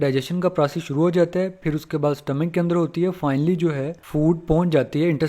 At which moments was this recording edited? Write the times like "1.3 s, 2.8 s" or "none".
4.0 s